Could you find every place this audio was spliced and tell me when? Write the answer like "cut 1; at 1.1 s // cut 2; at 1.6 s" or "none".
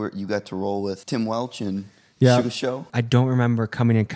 cut 1; at 1.0 s // cut 2; at 2.9 s